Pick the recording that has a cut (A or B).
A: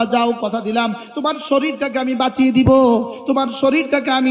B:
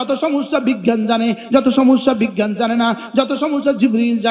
A